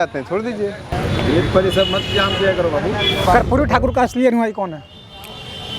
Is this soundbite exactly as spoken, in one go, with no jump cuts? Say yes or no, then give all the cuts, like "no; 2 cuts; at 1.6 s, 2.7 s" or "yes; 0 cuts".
no; 2 cuts; at 0.9 s, 3.2 s